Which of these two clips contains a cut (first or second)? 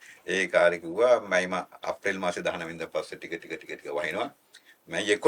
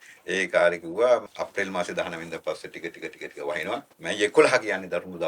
second